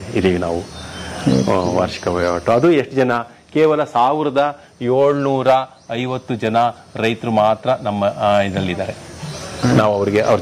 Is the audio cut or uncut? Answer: uncut